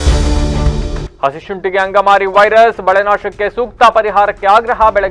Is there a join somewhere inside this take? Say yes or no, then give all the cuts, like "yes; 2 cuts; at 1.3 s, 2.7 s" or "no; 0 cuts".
yes; 1 cut; at 1.1 s